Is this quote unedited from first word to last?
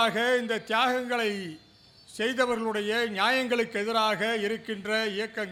yes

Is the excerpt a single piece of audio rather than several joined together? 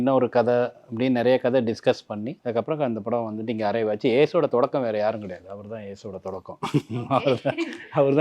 no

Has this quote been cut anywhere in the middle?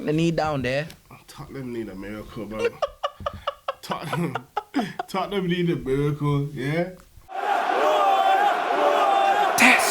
yes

